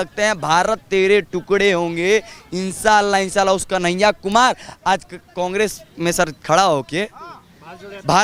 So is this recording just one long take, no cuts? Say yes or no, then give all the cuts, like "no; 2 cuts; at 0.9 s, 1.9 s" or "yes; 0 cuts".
yes; 0 cuts